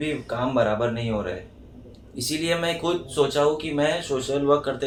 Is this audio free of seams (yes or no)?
yes